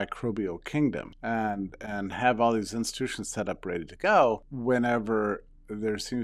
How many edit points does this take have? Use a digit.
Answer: 2